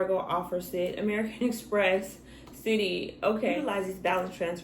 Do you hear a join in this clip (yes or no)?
yes